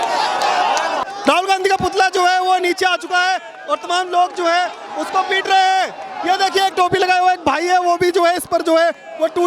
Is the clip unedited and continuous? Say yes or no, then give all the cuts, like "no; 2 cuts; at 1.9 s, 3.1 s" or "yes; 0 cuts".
no; 1 cut; at 1.0 s